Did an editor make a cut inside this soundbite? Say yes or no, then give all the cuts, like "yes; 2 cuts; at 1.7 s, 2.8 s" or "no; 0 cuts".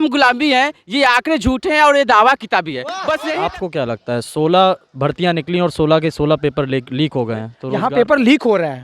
yes; 2 cuts; at 3.2 s, 7.6 s